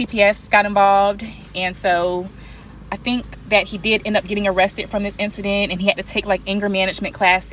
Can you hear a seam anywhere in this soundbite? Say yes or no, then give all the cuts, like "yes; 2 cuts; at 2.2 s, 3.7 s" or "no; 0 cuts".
no; 0 cuts